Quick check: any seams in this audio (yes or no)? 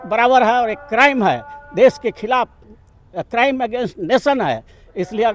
no